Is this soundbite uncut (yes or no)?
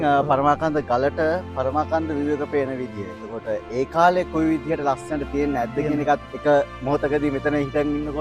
yes